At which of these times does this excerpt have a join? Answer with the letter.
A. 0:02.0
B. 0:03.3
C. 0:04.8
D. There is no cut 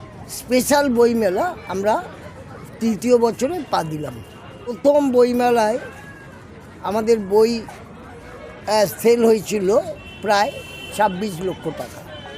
C